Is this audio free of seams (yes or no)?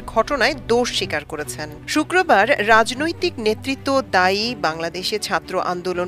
yes